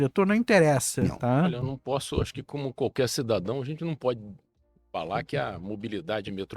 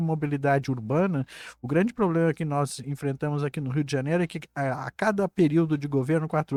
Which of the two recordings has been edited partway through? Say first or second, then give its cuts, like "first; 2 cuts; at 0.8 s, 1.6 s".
first; 1 cut; at 1.6 s